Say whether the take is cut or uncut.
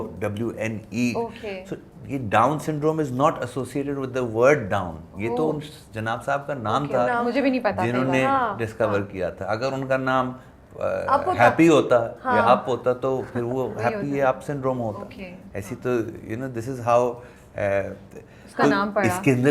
uncut